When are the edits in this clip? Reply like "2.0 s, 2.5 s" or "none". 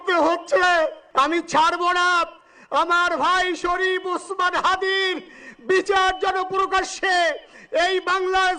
1.0 s